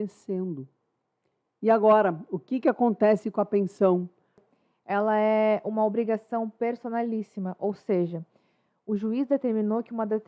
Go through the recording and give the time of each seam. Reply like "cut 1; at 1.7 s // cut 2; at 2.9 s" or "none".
cut 1; at 4.3 s